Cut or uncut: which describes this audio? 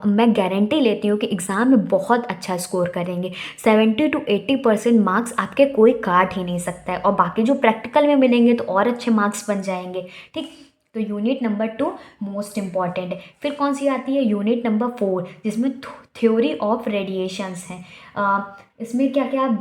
uncut